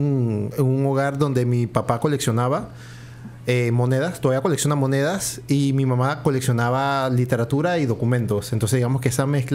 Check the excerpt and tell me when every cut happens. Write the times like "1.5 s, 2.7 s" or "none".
none

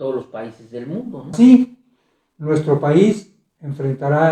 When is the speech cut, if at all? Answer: 1.3 s

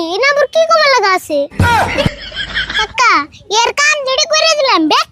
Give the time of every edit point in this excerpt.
1.5 s, 2.7 s

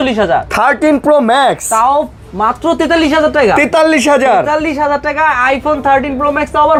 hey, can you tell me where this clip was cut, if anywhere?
none

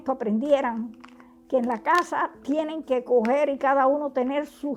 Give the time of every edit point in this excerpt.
none

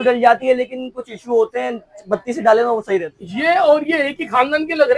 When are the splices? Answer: 3.2 s

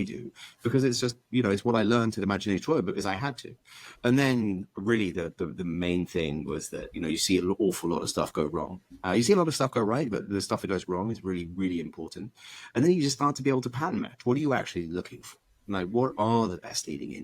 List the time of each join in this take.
none

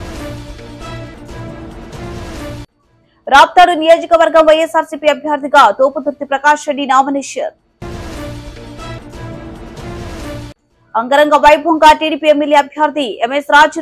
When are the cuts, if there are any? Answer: 2.0 s

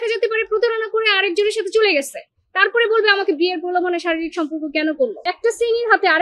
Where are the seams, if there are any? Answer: 5.3 s

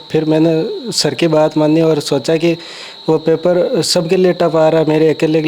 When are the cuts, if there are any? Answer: none

